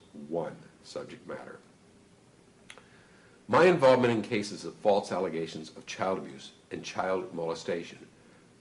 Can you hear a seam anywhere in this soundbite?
yes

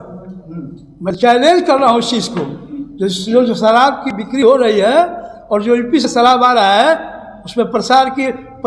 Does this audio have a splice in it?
no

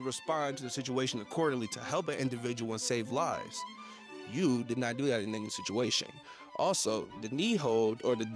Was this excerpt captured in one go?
yes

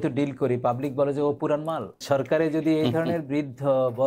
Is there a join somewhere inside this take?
yes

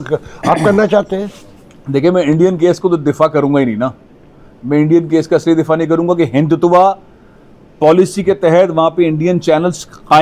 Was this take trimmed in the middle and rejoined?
no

